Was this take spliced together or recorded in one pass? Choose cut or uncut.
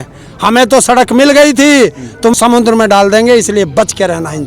cut